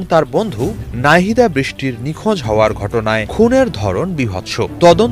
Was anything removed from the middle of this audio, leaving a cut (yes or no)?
yes